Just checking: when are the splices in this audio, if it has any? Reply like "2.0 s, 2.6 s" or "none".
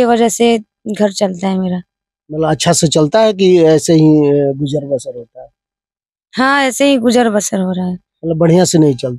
none